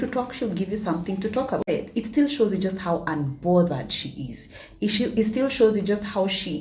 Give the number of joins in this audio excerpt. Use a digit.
1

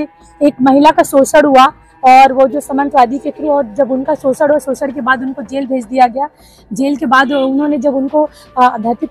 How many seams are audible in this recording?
0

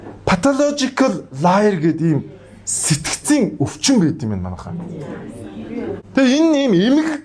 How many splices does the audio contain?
1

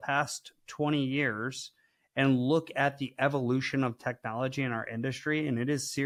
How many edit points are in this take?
0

